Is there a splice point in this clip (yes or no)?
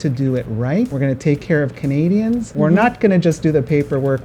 yes